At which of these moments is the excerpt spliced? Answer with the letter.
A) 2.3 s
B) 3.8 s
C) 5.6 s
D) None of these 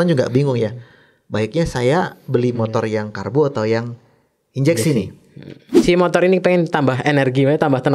C